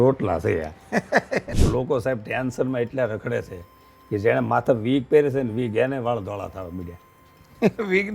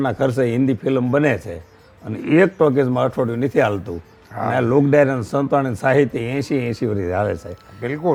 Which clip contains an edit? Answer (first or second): first